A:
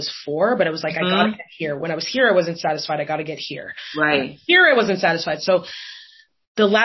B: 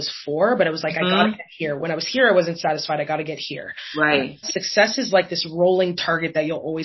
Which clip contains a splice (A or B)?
B